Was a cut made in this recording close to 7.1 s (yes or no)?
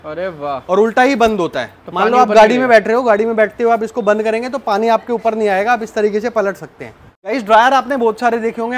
yes